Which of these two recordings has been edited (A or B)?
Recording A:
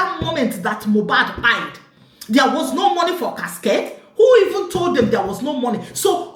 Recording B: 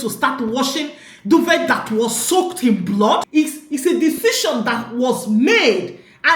B